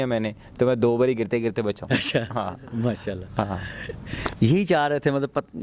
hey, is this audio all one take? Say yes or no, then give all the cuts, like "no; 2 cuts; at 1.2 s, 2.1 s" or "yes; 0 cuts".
yes; 0 cuts